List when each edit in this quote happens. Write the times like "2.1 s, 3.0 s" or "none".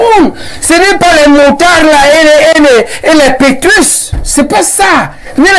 none